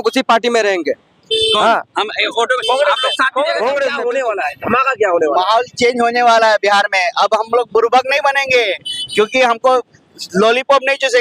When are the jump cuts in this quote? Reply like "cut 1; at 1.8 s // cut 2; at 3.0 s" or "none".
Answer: cut 1; at 4.0 s